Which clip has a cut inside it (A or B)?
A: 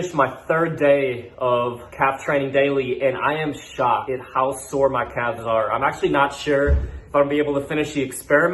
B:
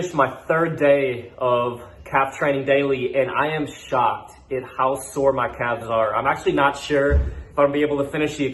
A